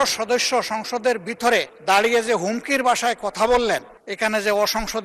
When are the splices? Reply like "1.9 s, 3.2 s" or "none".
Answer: 1.7 s, 4.0 s